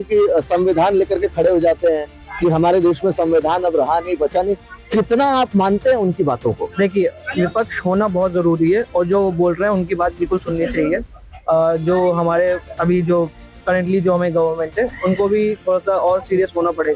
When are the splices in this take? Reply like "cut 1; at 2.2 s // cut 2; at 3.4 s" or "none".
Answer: none